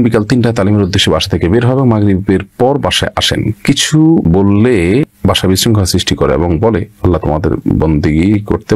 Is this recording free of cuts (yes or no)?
yes